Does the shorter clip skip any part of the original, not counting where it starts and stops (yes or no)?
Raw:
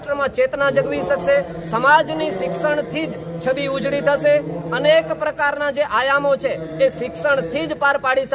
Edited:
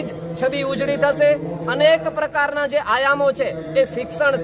no